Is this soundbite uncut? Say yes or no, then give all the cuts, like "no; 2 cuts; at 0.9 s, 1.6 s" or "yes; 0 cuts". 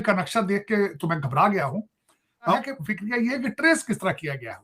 no; 1 cut; at 2.5 s